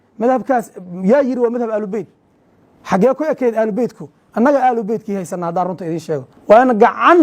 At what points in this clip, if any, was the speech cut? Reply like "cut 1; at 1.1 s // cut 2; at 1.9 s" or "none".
cut 1; at 6.3 s